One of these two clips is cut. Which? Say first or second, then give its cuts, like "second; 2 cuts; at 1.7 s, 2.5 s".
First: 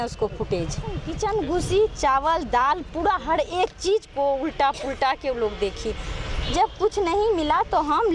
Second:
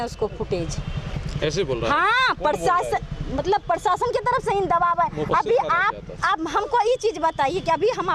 first; 1 cut; at 1.1 s